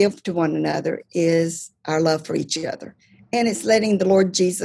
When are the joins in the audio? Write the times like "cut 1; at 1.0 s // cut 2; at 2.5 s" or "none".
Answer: none